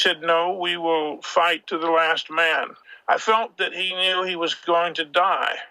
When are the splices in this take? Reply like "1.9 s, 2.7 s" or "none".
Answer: 1.7 s, 2.8 s